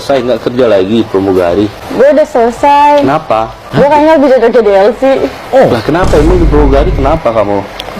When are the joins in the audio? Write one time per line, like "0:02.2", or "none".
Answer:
0:01.8
0:03.6